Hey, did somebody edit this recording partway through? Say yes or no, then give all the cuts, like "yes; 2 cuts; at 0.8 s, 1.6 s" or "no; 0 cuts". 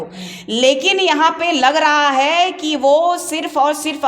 no; 0 cuts